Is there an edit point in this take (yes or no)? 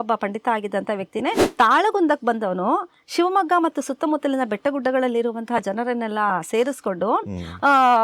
yes